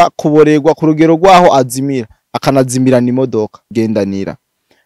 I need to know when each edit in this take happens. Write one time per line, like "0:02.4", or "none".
0:03.7